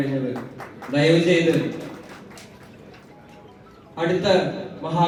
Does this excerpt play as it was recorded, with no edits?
yes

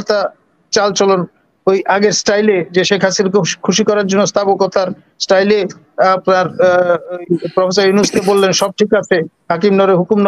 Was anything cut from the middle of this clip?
no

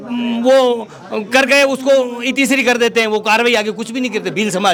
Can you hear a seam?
no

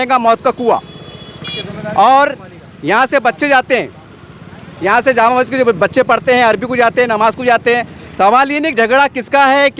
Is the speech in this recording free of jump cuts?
yes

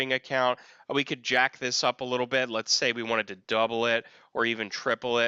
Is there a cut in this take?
no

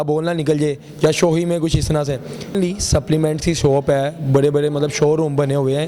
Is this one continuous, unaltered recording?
no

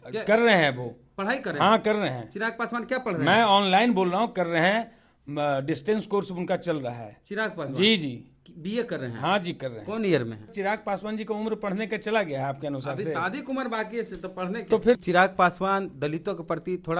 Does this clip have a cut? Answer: yes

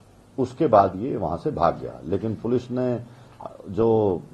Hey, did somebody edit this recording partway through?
no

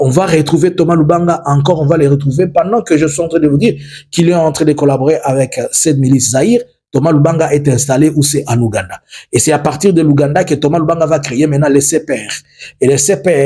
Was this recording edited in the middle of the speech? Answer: no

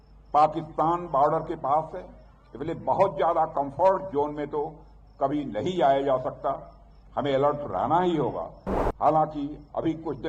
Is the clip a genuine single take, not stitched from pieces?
yes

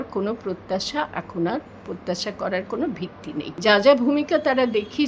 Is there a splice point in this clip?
yes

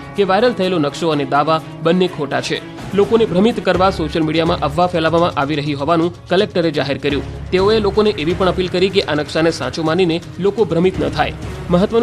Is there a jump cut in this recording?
no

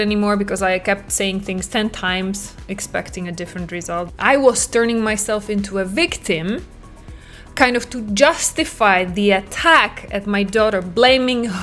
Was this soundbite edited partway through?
yes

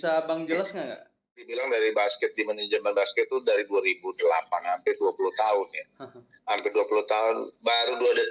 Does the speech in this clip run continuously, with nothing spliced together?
no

